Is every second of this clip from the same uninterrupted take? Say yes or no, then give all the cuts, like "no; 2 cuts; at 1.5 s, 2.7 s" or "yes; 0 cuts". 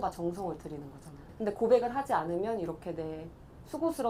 yes; 0 cuts